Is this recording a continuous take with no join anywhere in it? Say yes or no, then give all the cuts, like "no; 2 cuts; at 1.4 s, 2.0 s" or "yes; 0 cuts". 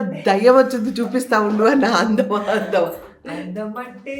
yes; 0 cuts